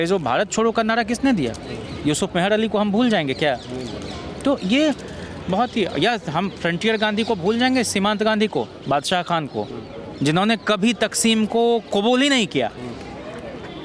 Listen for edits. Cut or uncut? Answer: uncut